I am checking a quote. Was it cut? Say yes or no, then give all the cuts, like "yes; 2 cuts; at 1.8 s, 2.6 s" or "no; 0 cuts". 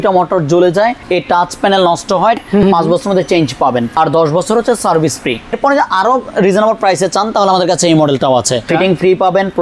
yes; 5 cuts; at 1.0 s, 2.4 s, 3.9 s, 5.6 s, 8.7 s